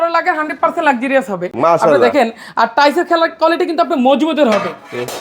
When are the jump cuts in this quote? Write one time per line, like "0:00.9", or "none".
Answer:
none